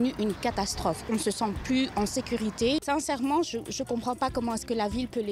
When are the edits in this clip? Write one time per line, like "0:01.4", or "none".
0:02.8

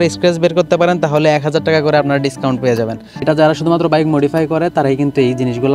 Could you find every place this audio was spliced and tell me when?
0:03.2

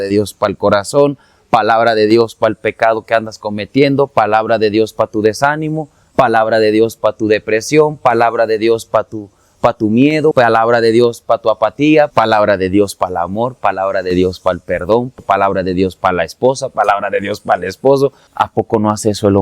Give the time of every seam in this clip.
0:10.3
0:12.1
0:15.1
0:18.2

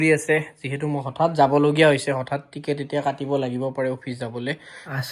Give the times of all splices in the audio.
none

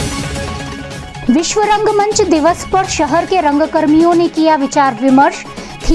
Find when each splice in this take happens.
0:01.1

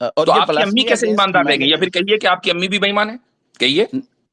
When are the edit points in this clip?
none

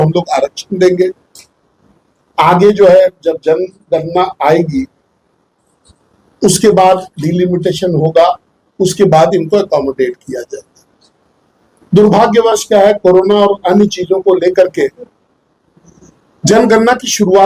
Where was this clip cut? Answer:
none

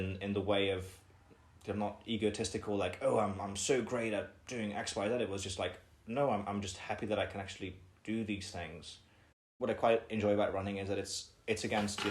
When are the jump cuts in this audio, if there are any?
0:09.4

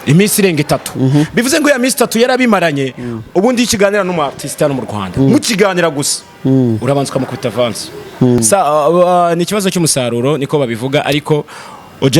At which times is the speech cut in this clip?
0:08.4

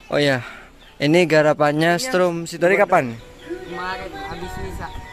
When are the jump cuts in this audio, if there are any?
0:02.4

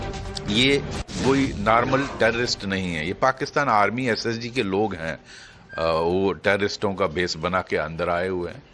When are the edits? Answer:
0:01.0

